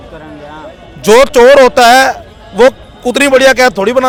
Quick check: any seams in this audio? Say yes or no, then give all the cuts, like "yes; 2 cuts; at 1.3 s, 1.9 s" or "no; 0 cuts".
no; 0 cuts